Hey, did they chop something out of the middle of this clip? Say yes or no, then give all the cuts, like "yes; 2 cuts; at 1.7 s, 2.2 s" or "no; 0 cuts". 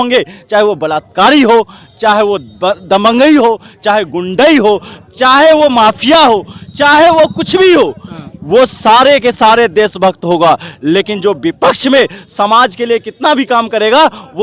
no; 0 cuts